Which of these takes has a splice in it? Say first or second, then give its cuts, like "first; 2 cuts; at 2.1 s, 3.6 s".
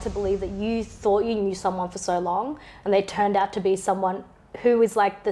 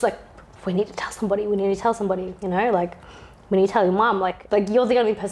second; 1 cut; at 4.4 s